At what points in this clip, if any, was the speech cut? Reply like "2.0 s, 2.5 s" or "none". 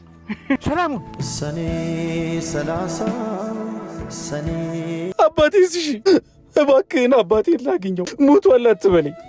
5.1 s